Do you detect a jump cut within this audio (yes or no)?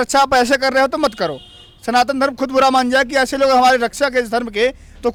no